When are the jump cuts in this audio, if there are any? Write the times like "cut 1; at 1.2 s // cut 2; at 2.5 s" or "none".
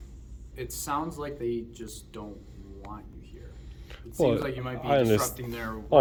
none